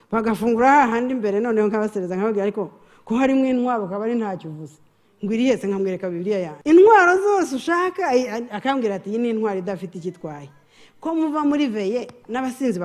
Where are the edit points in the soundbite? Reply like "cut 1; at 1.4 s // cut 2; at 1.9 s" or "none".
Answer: cut 1; at 6.5 s